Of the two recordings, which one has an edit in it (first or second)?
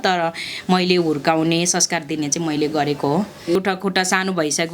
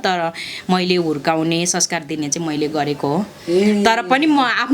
first